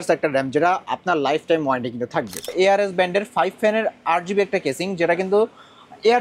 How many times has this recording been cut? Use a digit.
1